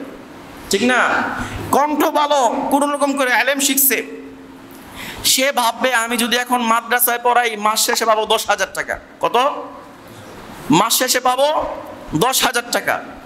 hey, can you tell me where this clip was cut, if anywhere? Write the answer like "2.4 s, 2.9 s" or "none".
1.6 s